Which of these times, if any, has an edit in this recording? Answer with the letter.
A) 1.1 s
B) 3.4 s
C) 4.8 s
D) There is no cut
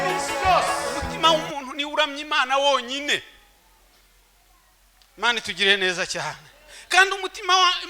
A